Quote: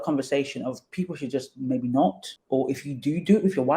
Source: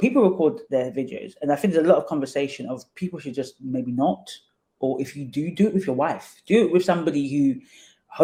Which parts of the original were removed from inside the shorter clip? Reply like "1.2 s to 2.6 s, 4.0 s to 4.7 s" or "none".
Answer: 4.3 s to 4.6 s